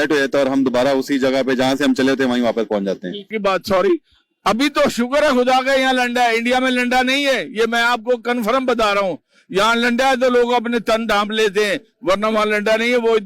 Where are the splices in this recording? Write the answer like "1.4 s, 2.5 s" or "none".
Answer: 3.3 s